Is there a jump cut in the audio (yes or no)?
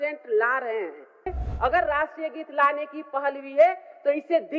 yes